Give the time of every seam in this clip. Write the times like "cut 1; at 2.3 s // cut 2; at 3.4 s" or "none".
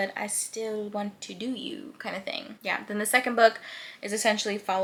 none